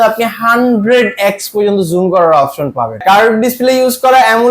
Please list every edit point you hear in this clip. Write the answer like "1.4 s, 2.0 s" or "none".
3.0 s